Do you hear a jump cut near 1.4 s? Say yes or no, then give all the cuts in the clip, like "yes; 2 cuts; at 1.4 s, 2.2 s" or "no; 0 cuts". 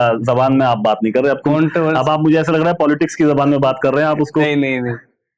no; 0 cuts